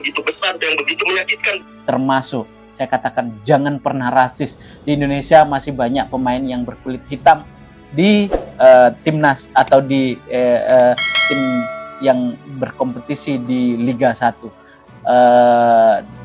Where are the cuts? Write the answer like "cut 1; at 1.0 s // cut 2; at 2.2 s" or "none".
cut 1; at 1.7 s